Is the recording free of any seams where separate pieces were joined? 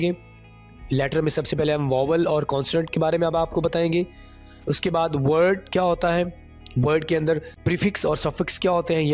no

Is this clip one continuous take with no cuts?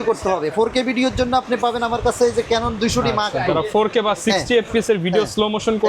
yes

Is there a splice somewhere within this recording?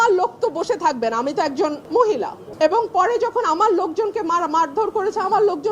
yes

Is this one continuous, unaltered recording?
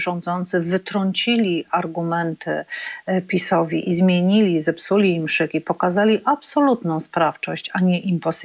yes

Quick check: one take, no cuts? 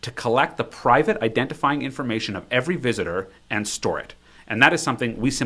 yes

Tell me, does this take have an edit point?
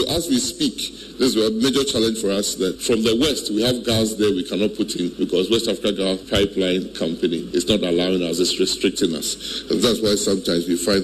yes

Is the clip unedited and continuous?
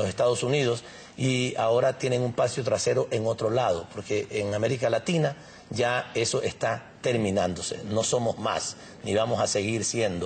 yes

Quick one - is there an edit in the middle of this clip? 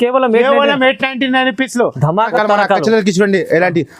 yes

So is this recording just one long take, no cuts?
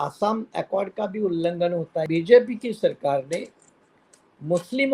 no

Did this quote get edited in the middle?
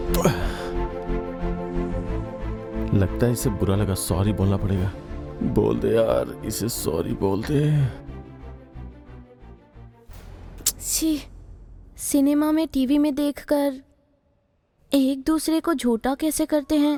no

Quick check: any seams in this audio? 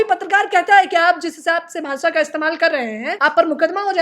yes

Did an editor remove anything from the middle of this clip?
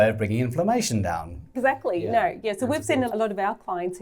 yes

